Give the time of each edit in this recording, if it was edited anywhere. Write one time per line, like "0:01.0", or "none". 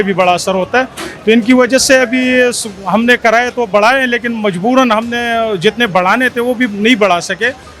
none